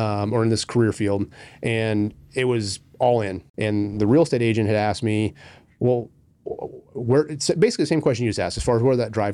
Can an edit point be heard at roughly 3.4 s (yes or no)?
yes